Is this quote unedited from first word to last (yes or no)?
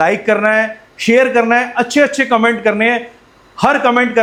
yes